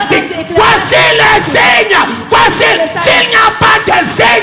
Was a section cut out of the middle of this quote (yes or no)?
no